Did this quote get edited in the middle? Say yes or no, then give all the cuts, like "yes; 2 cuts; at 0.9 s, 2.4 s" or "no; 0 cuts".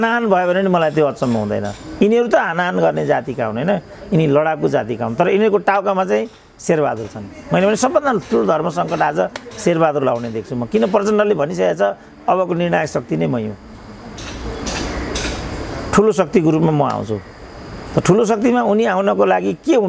no; 0 cuts